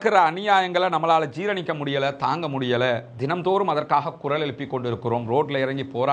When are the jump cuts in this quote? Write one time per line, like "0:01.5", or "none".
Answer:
none